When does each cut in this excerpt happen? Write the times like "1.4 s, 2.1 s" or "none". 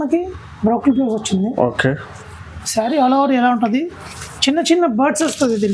none

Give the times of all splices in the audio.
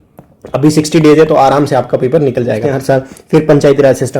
2.7 s

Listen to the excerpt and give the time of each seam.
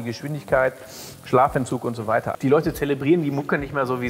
2.3 s

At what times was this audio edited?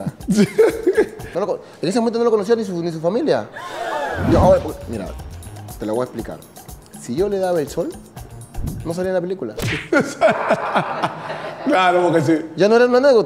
1.3 s, 4.3 s

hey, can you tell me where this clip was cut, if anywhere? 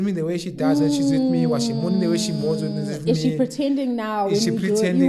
none

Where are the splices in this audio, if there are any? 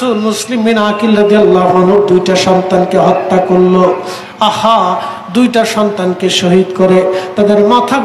none

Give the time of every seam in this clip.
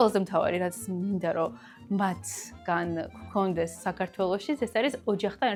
none

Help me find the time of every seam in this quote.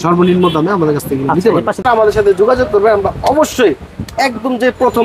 1.8 s

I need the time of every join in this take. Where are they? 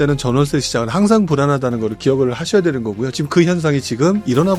none

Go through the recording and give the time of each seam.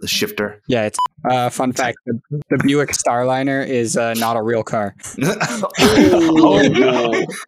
0.8 s, 5.0 s

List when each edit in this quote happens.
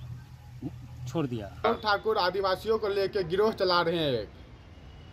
1.6 s

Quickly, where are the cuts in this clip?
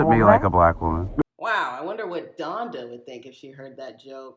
1.2 s

